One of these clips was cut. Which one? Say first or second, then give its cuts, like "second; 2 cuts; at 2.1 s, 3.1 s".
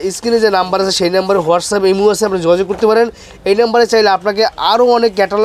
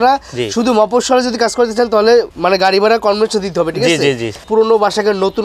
second; 2 cuts; at 2.3 s, 4.5 s